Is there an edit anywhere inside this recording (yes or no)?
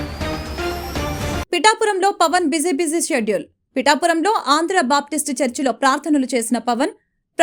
no